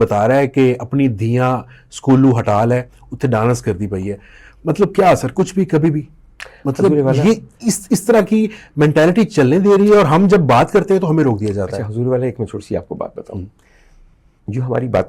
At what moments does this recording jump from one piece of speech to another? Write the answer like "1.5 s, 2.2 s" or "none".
none